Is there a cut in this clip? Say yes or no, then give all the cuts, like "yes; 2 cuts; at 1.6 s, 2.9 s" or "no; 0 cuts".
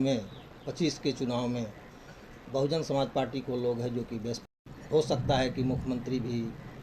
yes; 1 cut; at 4.5 s